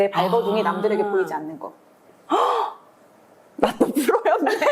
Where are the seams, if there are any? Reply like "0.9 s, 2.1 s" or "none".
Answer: none